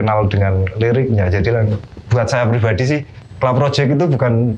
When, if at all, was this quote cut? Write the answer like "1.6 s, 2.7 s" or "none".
3.2 s